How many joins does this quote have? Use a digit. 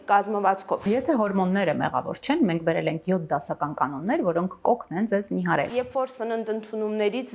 2